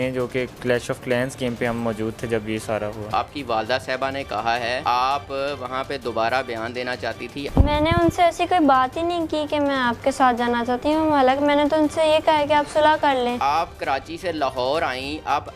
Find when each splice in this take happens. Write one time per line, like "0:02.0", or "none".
0:03.1
0:04.8
0:07.5
0:13.4